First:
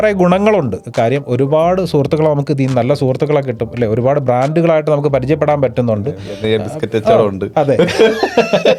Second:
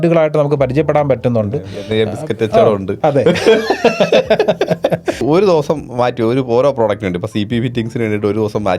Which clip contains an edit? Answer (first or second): second